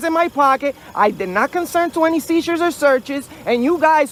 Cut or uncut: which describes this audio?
uncut